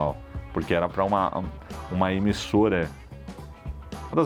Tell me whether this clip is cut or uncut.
uncut